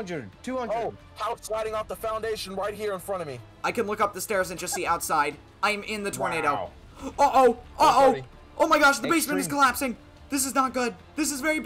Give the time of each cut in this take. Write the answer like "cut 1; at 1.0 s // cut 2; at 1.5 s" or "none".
none